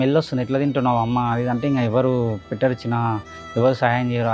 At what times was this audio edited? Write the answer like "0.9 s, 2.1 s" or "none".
none